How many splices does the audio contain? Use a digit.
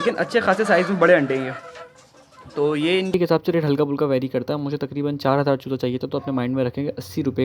1